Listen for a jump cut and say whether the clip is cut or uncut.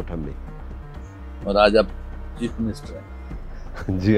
uncut